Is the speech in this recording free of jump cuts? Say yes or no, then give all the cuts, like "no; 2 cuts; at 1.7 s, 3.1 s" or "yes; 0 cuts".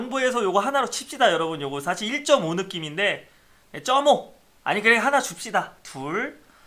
yes; 0 cuts